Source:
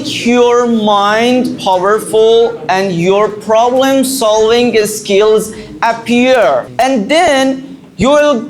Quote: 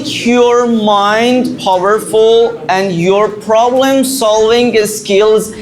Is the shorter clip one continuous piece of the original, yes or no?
yes